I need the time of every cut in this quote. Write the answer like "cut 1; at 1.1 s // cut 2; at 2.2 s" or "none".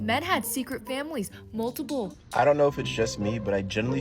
cut 1; at 2.2 s

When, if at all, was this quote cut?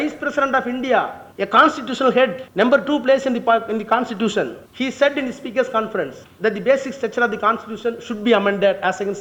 cut 1; at 1.2 s // cut 2; at 2.4 s // cut 3; at 4.6 s // cut 4; at 6.2 s

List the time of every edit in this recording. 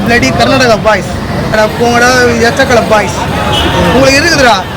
cut 1; at 1.6 s

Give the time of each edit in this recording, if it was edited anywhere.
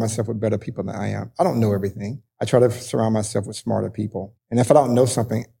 cut 1; at 4.4 s

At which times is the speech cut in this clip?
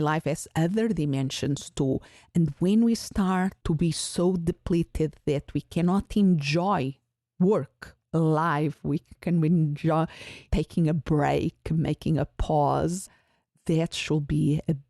cut 1; at 3.6 s // cut 2; at 8.0 s

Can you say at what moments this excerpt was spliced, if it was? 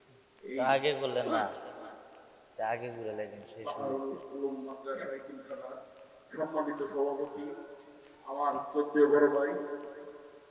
none

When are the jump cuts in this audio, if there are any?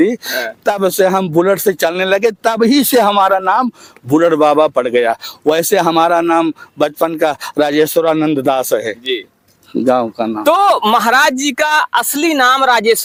none

